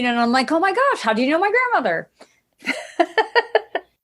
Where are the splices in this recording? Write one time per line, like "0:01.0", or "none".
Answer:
none